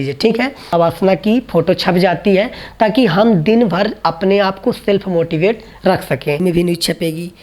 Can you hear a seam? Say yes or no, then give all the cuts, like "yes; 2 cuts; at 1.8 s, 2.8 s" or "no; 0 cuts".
yes; 2 cuts; at 0.7 s, 6.4 s